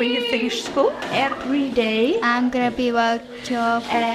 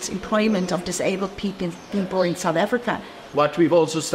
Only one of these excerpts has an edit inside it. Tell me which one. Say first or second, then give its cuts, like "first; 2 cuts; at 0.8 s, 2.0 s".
second; 1 cut; at 3.1 s